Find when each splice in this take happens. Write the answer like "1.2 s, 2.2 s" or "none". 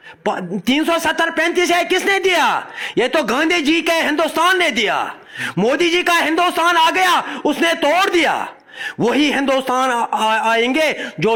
none

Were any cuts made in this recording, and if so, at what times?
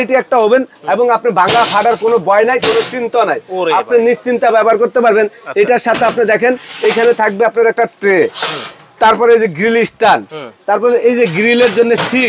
none

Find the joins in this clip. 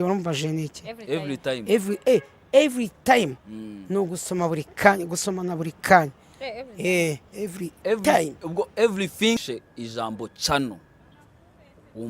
9.4 s

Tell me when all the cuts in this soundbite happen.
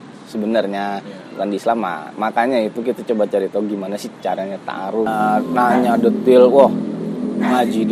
5.1 s

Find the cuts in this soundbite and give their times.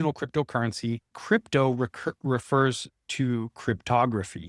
1.1 s

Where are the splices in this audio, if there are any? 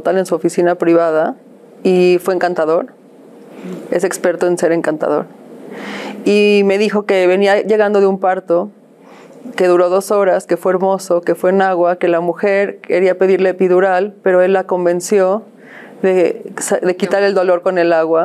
none

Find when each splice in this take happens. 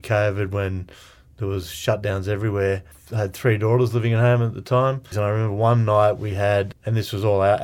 3.0 s, 5.1 s, 6.7 s

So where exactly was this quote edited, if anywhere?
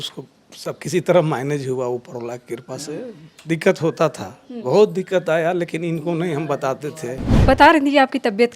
7.3 s

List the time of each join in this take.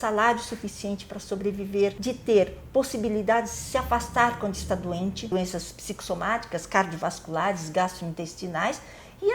2.0 s, 5.3 s

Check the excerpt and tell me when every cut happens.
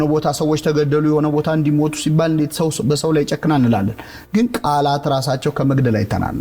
none

